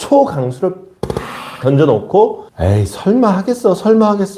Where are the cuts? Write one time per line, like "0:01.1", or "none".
0:02.5